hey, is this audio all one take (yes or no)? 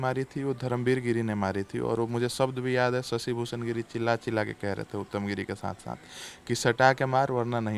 yes